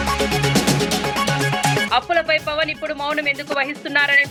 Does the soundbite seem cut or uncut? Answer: uncut